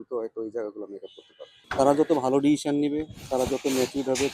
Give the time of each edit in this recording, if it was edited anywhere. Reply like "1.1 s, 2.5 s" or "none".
1.6 s